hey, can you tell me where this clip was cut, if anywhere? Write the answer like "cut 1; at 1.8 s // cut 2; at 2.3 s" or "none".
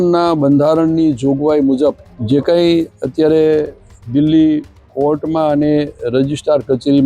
cut 1; at 2.1 s